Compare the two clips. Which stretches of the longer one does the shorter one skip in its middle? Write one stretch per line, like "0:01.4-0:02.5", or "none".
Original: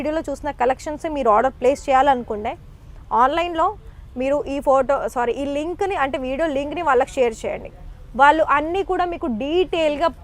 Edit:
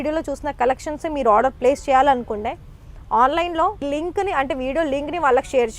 0:03.8-0:05.4